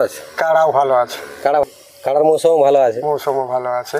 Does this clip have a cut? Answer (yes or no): yes